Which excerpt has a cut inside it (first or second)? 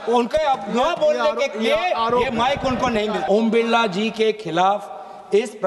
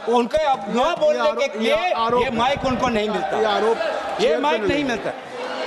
first